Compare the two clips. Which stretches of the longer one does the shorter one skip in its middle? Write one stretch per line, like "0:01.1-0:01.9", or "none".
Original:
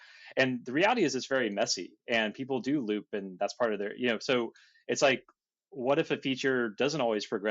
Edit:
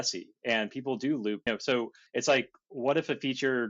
0:03.4-0:04.5
0:05.4-0:05.6